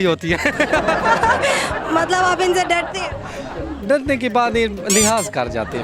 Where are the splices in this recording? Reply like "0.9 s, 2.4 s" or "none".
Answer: 4.8 s